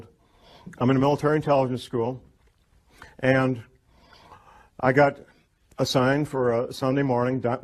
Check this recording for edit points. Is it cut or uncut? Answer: uncut